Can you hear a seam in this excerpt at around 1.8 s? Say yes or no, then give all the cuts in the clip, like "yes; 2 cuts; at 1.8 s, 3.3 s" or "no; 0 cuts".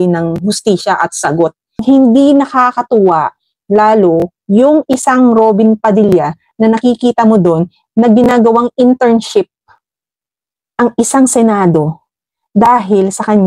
yes; 1 cut; at 1.8 s